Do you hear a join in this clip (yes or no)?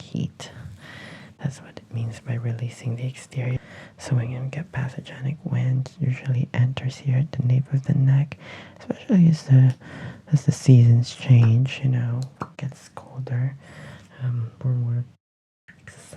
yes